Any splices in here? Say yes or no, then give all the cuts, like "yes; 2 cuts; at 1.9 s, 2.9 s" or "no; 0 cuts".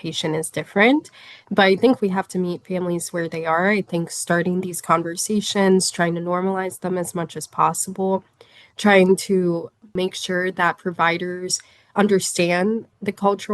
yes; 1 cut; at 9.9 s